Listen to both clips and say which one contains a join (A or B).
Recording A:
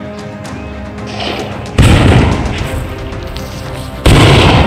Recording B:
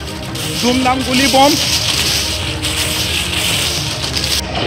A